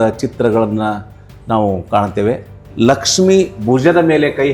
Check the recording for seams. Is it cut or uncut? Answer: cut